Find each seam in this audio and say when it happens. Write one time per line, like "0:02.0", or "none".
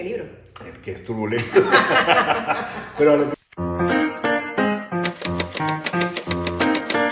0:03.3

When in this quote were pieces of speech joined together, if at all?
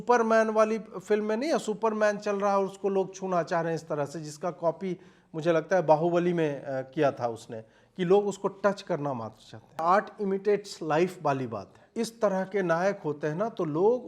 0:09.8
0:11.8

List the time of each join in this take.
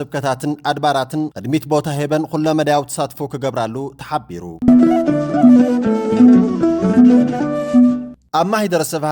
0:04.5
0:08.0

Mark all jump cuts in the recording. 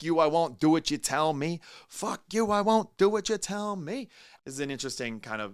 0:04.3

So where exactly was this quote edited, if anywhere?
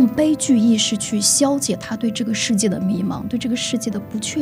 none

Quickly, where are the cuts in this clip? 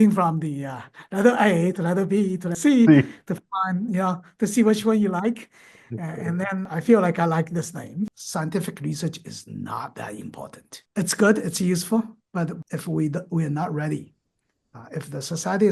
0:08.2
0:12.7

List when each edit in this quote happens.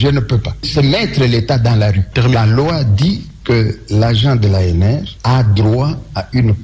0:02.3

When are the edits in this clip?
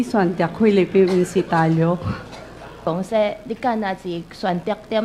0:02.8

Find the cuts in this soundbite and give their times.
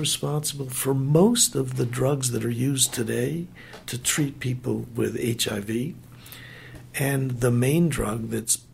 none

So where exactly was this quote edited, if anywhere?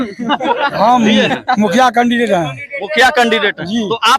none

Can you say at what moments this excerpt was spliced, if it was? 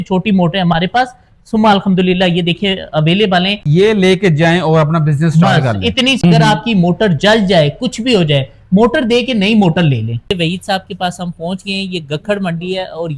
0:03.6
0:06.2
0:10.3

